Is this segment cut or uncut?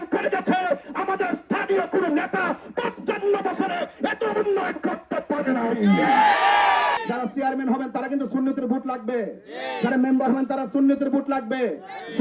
cut